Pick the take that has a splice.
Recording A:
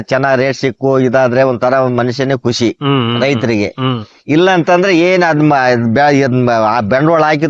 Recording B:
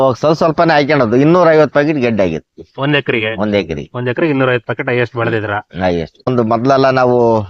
B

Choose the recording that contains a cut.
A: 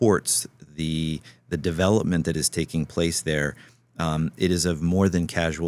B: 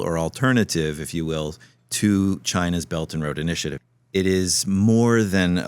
B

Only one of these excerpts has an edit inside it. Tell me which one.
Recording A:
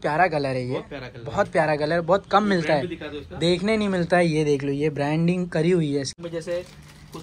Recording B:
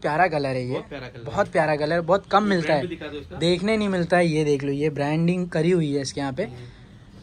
A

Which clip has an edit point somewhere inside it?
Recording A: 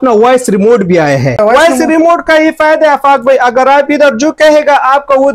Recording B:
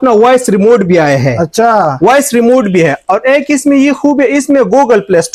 A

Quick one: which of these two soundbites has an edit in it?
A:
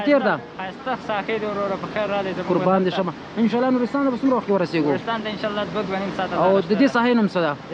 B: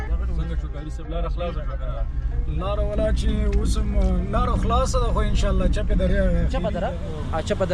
B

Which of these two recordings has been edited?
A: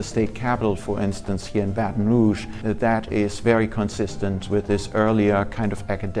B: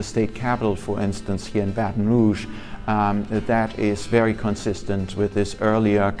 A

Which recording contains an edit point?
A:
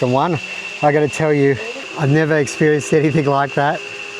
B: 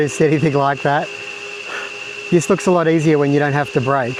A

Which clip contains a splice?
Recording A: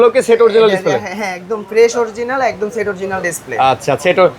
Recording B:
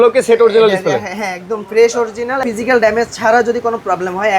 B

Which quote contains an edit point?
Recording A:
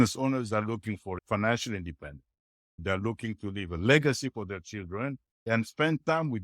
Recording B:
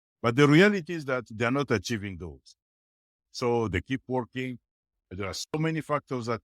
A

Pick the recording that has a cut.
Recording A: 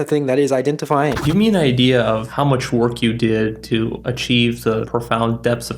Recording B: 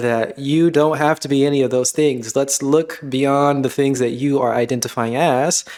A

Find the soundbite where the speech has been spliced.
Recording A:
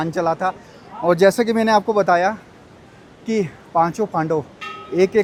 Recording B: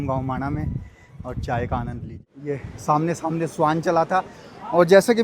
B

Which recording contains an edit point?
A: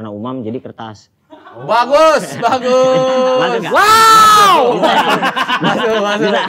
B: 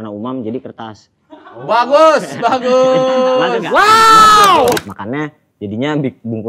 B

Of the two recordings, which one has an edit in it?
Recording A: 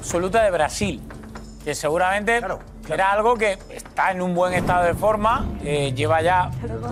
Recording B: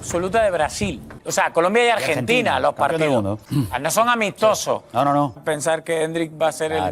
B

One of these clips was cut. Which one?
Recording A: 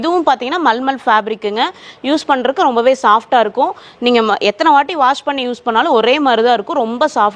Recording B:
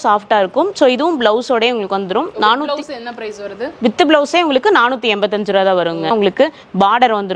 B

